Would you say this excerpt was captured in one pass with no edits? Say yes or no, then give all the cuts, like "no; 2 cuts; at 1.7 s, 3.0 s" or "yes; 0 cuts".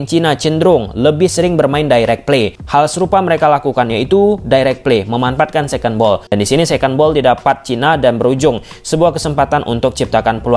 no; 2 cuts; at 2.6 s, 6.2 s